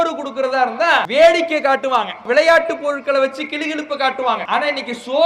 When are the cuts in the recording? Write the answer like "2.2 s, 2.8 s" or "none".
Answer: 1.1 s, 2.2 s, 4.4 s